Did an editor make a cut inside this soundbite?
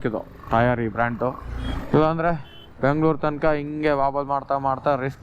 yes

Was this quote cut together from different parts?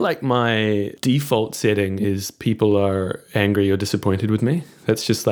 yes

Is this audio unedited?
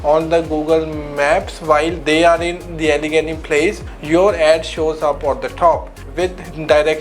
yes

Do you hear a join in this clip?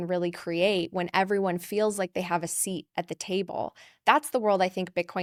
no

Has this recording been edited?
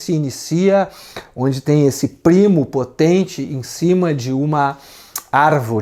no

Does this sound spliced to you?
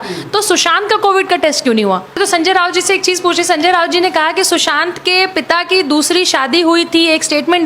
yes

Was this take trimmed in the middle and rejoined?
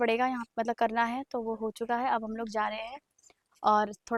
no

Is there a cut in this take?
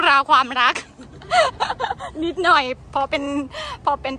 no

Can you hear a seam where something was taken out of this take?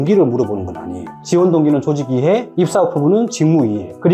no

